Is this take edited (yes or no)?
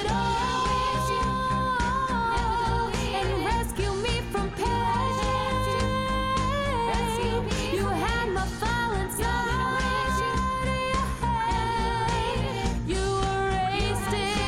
no